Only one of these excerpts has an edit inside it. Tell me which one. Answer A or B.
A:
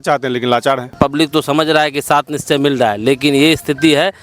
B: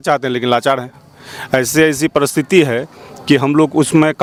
A